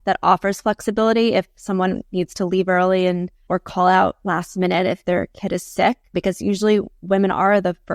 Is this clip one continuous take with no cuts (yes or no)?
no